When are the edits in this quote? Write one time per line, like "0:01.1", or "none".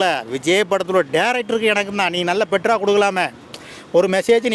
none